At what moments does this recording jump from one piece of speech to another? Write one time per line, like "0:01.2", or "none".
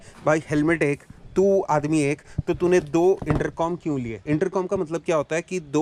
none